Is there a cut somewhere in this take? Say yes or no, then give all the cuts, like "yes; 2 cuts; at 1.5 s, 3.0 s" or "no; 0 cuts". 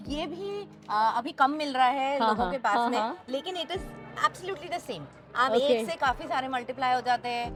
no; 0 cuts